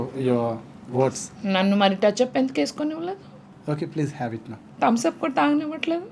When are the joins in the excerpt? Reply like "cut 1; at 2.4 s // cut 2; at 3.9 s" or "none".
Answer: none